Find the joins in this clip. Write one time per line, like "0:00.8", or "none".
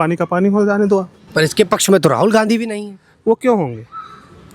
none

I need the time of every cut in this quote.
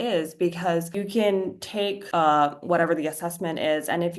0:00.9
0:02.0

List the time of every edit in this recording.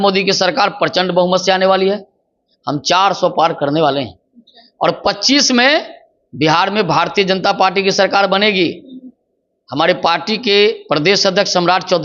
none

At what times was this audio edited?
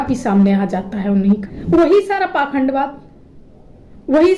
0:01.5

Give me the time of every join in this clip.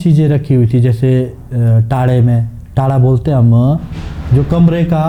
none

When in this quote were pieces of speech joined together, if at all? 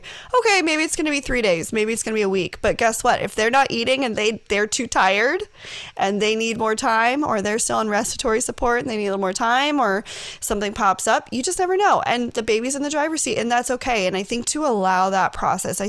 none

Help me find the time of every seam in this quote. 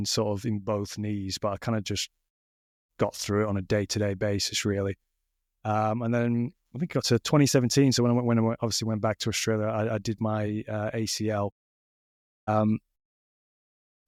none

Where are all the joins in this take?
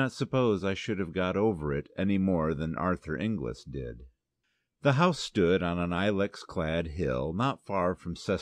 0:01.9

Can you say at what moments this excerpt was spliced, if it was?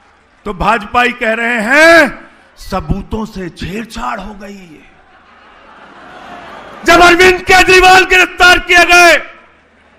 0:06.8

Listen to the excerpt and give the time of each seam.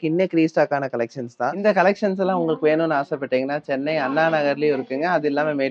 0:01.6

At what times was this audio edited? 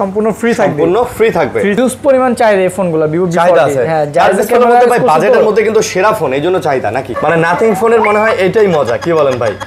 0:01.8
0:07.1

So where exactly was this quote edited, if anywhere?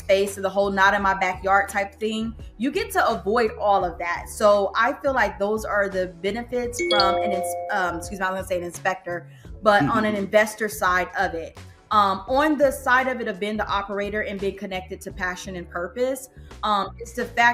none

